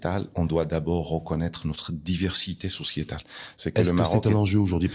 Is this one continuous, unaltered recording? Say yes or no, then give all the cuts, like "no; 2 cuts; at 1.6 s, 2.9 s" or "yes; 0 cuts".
yes; 0 cuts